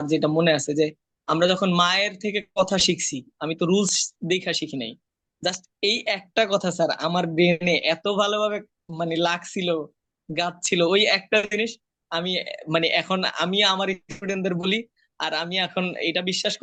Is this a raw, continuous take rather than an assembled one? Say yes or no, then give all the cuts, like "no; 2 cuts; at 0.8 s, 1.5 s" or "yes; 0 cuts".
yes; 0 cuts